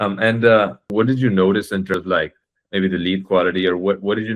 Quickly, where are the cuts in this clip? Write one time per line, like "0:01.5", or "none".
0:00.9
0:01.9